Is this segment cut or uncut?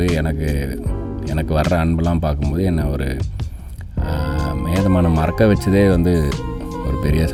uncut